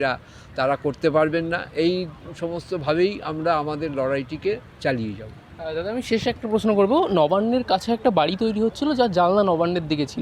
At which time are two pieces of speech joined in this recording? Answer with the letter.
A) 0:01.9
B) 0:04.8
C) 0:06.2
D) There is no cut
D